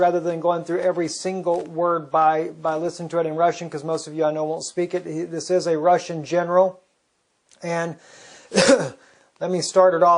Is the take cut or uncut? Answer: uncut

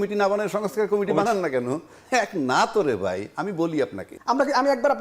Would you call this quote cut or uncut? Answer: cut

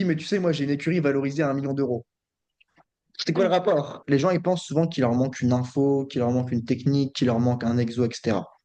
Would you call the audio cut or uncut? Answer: cut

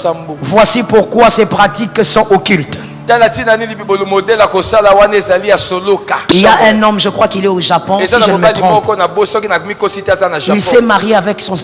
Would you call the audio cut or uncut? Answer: cut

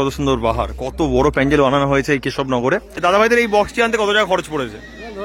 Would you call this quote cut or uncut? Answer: cut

